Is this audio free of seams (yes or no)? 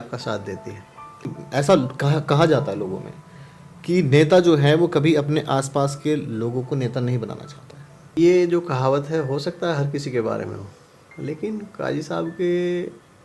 no